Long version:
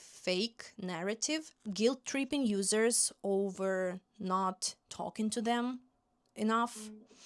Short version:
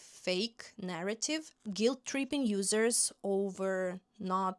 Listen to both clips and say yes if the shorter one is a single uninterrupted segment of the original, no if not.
yes